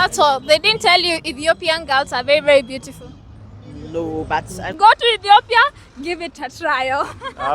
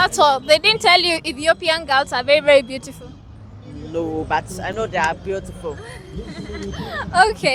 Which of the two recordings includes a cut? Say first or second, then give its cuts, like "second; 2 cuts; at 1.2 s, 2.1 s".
first; 1 cut; at 4.6 s